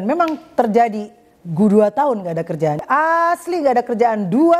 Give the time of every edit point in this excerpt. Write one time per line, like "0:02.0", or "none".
0:02.8